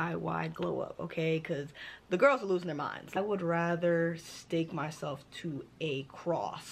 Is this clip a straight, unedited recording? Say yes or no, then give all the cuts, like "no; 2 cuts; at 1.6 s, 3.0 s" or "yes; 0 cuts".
no; 1 cut; at 3.2 s